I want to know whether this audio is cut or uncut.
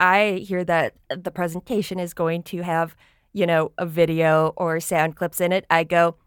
uncut